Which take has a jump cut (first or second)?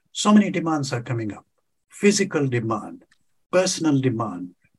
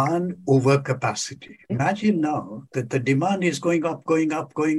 second